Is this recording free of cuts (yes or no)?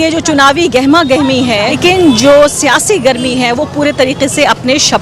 no